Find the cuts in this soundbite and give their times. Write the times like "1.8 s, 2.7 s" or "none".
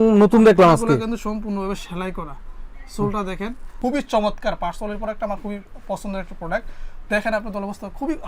3.7 s